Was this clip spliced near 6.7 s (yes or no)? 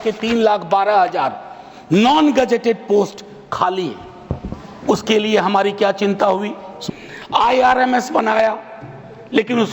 yes